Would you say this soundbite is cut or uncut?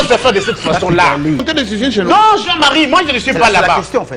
uncut